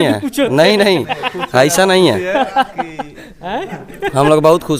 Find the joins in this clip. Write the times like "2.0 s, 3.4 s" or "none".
none